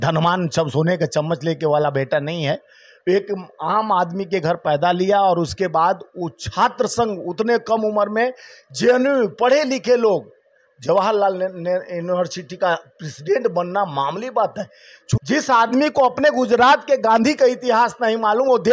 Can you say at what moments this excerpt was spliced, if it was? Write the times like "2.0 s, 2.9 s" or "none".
15.2 s